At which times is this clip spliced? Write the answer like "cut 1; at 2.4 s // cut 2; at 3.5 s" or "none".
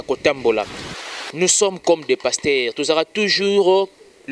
cut 1; at 0.9 s